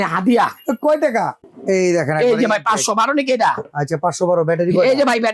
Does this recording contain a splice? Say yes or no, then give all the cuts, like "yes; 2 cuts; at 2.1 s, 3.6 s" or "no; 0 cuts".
yes; 1 cut; at 1.4 s